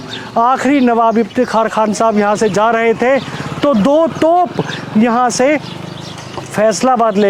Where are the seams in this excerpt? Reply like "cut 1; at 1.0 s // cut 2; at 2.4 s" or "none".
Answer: none